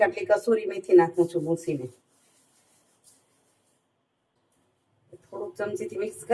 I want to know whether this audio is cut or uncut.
uncut